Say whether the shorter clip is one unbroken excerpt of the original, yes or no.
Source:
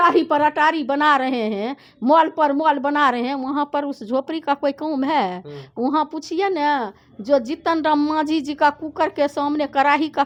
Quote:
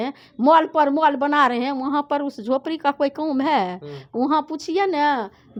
yes